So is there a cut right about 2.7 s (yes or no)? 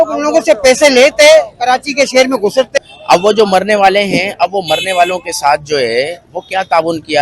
yes